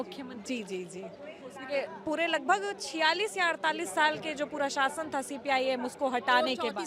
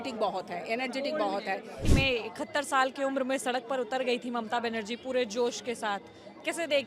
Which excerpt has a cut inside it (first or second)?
second